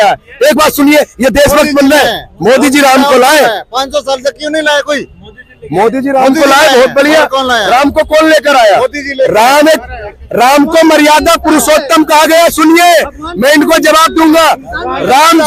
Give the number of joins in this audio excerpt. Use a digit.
0